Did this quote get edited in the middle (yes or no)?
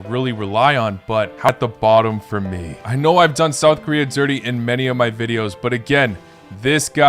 yes